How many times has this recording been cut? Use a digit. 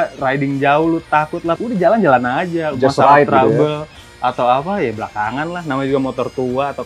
1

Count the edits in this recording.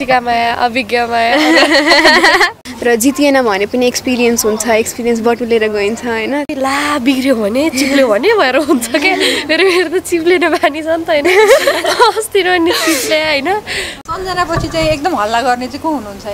3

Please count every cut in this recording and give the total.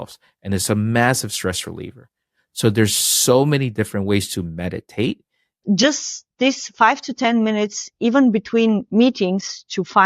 1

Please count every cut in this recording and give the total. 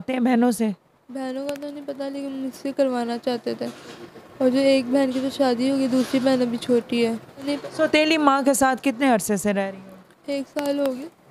1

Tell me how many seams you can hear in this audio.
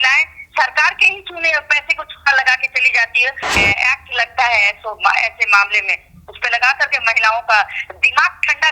1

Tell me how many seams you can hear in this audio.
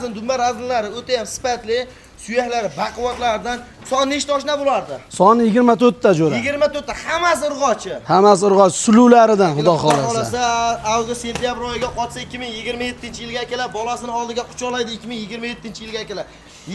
0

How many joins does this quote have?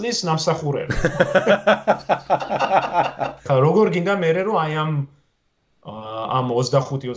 1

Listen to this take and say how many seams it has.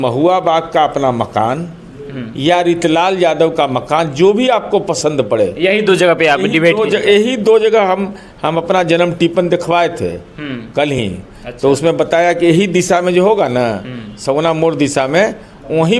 0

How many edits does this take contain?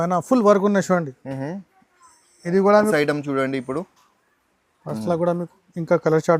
1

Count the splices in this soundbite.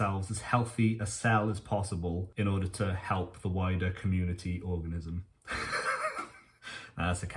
0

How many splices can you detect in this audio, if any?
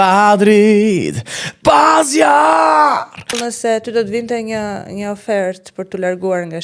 1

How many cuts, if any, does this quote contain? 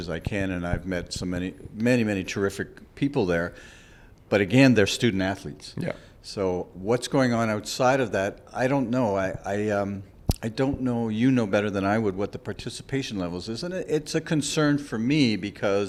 0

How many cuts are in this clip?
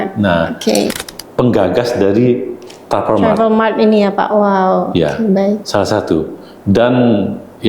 1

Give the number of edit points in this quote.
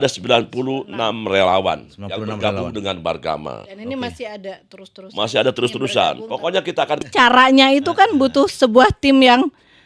1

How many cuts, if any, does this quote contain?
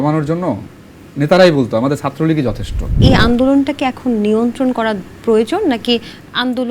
1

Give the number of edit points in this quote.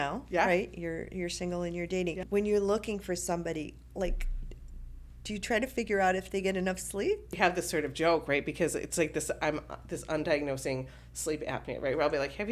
2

